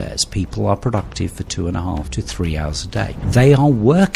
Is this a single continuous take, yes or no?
no